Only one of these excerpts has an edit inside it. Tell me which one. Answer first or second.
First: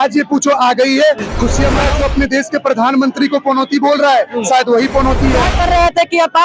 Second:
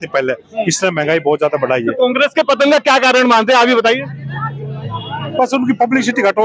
first